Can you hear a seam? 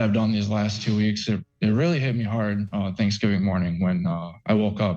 no; 0 cuts

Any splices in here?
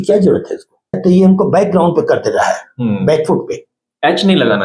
yes; 1 cut; at 1.0 s

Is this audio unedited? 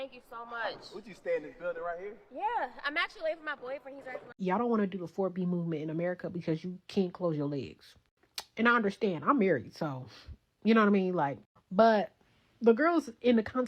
no; 1 cut; at 4.2 s

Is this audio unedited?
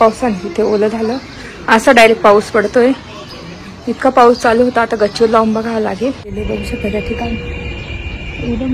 no; 1 cut; at 6.4 s

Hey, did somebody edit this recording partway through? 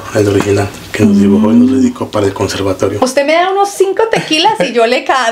yes; 1 cut; at 2.9 s

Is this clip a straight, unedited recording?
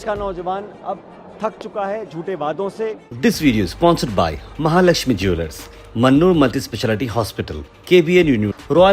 no; 1 cut; at 3.1 s

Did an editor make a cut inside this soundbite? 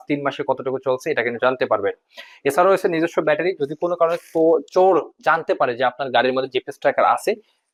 no; 0 cuts

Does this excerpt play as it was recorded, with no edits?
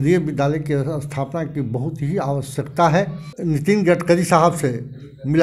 no; 1 cut; at 3.2 s

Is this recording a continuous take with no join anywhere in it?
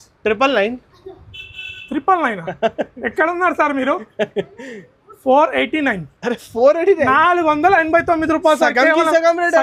yes; 0 cuts

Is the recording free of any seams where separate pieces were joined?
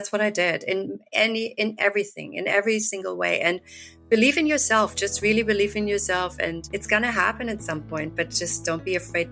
yes; 0 cuts

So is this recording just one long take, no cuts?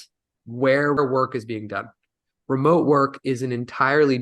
no; 1 cut; at 1.0 s

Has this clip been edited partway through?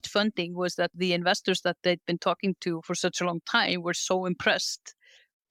no; 0 cuts

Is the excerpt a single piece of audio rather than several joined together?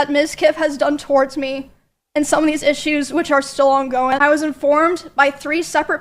no; 1 cut; at 4.1 s

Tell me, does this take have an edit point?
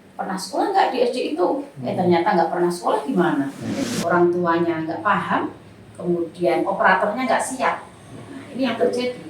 yes; 1 cut; at 3.8 s

